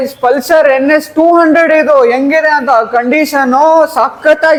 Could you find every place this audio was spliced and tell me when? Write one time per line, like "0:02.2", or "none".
none